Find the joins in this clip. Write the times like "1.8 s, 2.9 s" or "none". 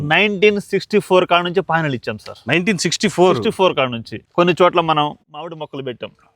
4.1 s